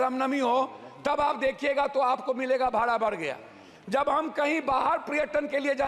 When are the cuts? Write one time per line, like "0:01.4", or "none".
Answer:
none